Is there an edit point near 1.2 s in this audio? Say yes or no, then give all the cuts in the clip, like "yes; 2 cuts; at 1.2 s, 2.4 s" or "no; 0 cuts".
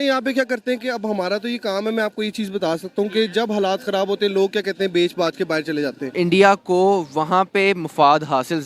no; 1 cut; at 6.0 s